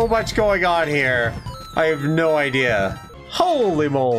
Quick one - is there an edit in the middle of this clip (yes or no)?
yes